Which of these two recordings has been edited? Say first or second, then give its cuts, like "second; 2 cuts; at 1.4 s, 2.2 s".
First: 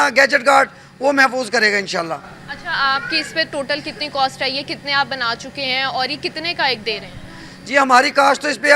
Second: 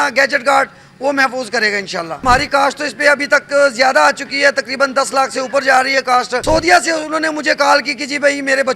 second; 2 cuts; at 2.2 s, 6.4 s